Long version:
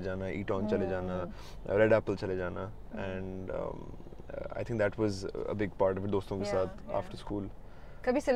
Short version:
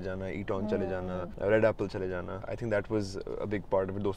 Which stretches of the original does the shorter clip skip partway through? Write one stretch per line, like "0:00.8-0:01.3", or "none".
0:01.3-0:01.6
0:02.7-0:04.5